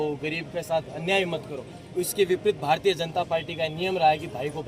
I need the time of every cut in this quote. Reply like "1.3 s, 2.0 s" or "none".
none